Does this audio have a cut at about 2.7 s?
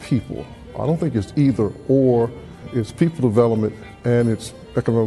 yes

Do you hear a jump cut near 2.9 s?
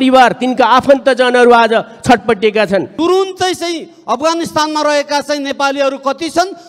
yes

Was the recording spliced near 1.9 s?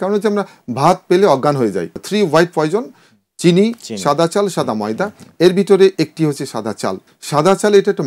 yes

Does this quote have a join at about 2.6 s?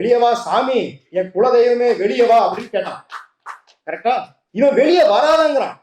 no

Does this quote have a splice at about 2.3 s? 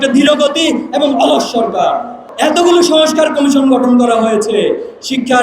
yes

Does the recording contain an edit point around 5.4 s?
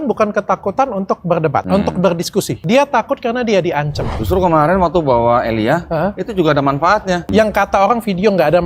no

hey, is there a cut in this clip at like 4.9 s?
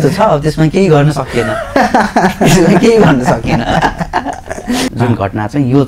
yes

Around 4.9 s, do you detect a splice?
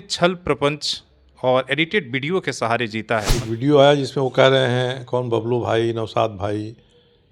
no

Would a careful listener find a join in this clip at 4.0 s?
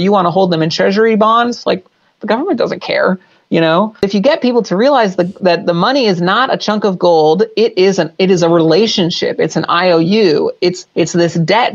yes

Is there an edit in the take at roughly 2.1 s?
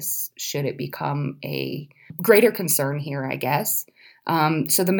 yes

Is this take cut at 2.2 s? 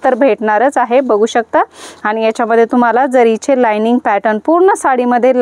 no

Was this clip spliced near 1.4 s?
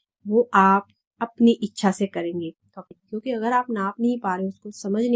no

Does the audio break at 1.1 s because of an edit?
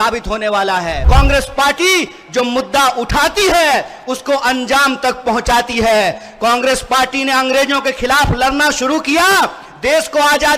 yes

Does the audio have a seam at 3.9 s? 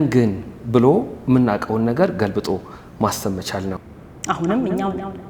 yes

